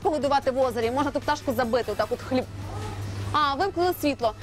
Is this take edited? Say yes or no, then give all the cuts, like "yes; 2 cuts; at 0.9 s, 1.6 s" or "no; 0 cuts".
no; 0 cuts